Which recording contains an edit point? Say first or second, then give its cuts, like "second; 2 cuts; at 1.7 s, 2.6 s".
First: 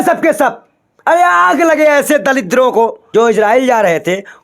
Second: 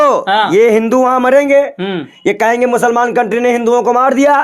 first; 1 cut; at 3.0 s